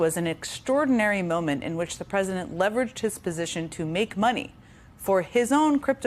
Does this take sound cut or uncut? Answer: uncut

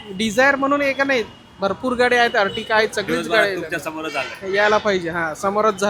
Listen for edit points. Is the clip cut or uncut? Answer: uncut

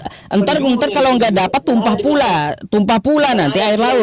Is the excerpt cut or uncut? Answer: uncut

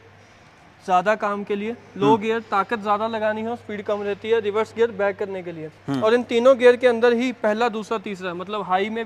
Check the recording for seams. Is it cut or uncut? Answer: uncut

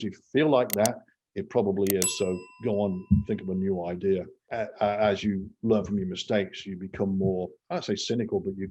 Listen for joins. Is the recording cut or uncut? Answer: cut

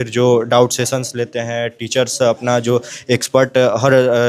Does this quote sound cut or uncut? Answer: uncut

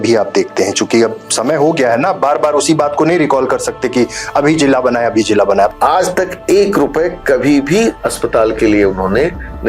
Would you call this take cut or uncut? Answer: cut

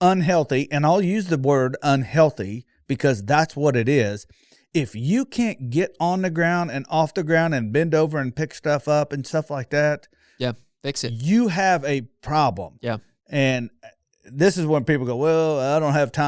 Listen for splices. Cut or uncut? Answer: uncut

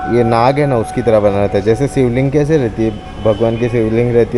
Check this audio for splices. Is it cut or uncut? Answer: uncut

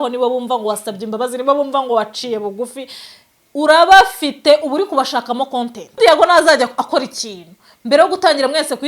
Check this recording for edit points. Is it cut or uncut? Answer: cut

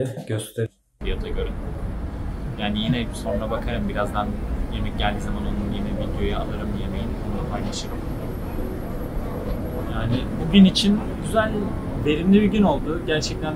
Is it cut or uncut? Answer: cut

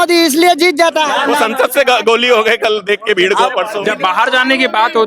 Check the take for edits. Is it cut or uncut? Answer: cut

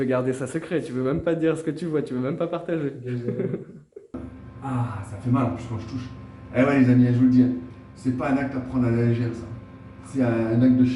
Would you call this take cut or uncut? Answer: cut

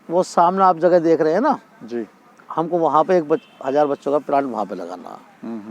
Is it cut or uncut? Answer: uncut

